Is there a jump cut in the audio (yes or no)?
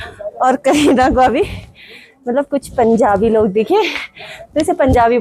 no